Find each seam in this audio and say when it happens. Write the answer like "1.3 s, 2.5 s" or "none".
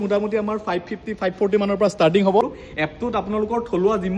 2.6 s